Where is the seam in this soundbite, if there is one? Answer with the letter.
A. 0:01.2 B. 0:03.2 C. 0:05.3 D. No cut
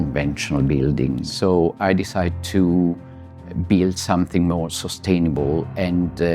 A